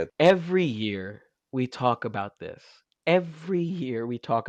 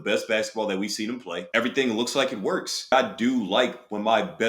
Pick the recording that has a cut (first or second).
second